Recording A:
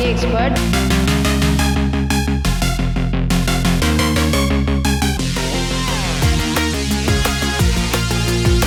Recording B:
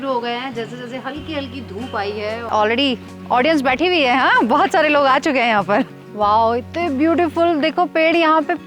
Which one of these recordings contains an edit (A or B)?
B